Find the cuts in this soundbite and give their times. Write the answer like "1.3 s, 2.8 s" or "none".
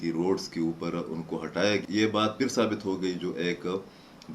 1.8 s